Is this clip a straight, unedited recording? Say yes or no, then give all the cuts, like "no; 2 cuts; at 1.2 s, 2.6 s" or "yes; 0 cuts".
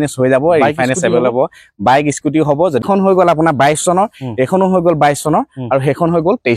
no; 1 cut; at 2.8 s